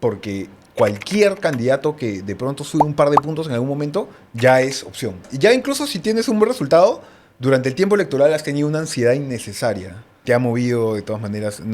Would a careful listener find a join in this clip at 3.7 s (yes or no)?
no